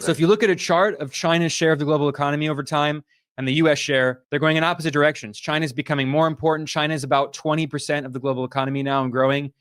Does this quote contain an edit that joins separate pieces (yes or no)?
no